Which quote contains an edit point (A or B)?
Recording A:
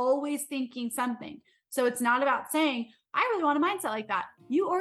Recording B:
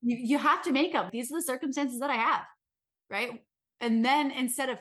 B